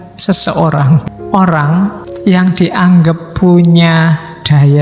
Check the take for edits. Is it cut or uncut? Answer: cut